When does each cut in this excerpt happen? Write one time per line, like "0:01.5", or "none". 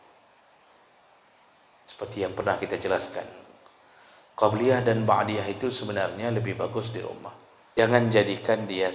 0:07.8